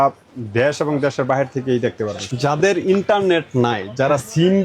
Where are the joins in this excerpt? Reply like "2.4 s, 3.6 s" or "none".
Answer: 2.3 s

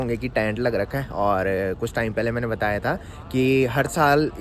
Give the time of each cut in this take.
none

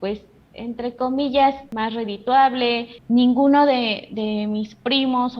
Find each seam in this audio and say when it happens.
1.7 s, 2.9 s

